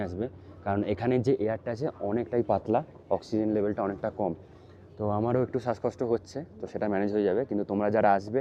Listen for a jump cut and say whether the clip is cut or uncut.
uncut